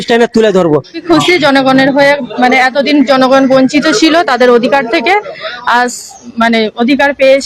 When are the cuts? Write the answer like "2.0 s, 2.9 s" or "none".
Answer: 1.0 s